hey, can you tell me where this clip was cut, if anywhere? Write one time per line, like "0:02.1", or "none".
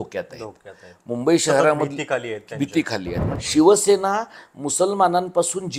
0:03.3